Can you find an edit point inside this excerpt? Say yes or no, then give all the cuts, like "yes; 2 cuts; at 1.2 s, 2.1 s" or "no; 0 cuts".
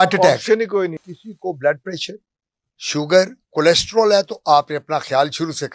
yes; 1 cut; at 1.0 s